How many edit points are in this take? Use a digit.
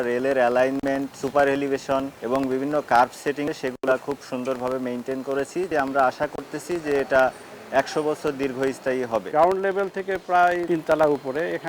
5